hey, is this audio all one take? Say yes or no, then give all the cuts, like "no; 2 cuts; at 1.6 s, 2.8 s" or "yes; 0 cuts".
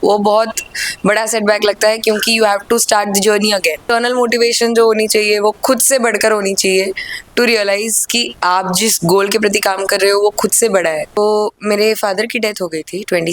no; 2 cuts; at 3.9 s, 11.2 s